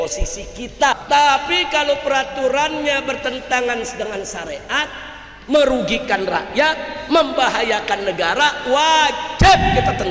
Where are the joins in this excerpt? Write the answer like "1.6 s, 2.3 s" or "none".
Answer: 0.9 s